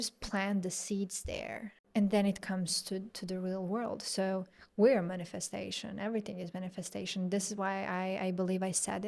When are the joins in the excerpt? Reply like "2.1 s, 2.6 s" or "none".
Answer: 1.7 s